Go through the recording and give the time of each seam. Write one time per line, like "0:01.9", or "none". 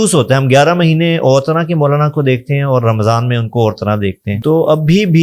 0:04.3